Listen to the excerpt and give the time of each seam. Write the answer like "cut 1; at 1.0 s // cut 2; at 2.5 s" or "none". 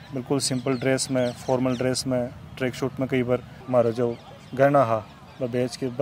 cut 1; at 3.5 s